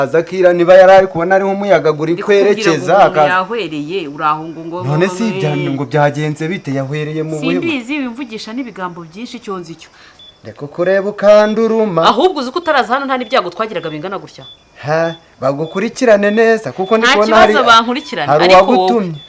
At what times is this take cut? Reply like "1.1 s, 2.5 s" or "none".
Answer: 10.3 s